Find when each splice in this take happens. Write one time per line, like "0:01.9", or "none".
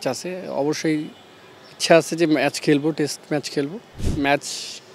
0:04.0

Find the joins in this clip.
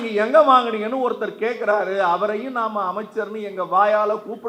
none

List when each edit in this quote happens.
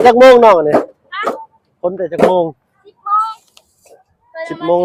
none

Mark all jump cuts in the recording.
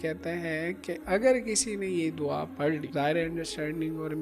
0:02.9

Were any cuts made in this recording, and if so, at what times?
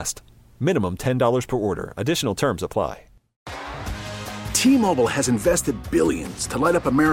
0:03.4

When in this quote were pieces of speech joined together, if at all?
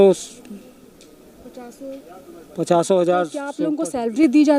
0:03.6

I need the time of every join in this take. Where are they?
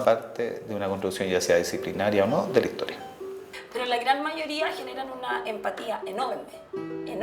0:03.4

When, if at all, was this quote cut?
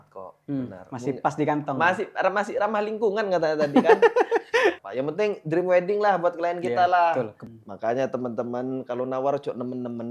0:04.9
0:07.4

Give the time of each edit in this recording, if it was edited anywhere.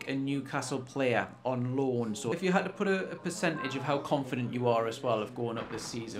0:02.4

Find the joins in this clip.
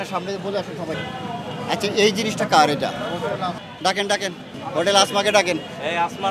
0:01.0
0:03.6
0:04.5

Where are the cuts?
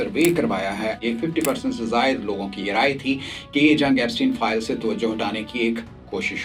0:01.0

